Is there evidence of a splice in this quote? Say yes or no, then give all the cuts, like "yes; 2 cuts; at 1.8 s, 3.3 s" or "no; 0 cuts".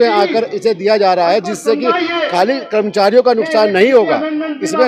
no; 0 cuts